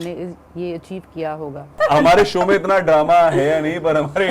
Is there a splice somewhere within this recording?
yes; 1 cut; at 1.8 s

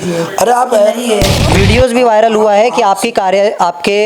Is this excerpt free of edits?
no; 1 cut; at 1.4 s

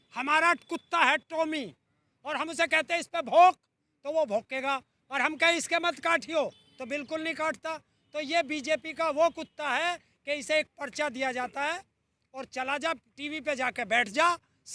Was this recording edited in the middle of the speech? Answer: no; 0 cuts

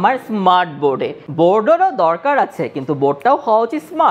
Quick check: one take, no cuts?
no; 1 cut; at 1.2 s

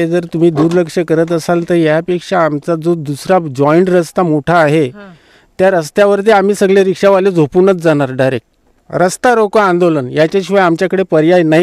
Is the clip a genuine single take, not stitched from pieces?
yes; 0 cuts

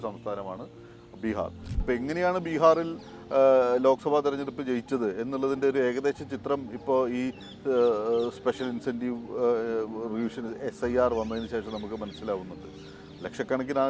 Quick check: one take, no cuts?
no; 1 cut; at 1.8 s

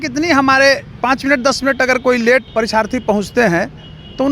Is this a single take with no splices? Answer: no; 2 cuts; at 1.0 s, 2.5 s

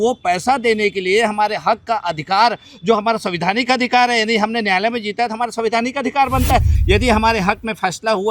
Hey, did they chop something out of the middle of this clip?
yes; 1 cut; at 6.7 s

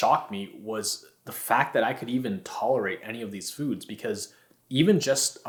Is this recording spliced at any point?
no; 0 cuts

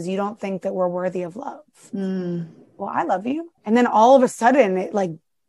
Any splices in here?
yes; 1 cut; at 3.5 s

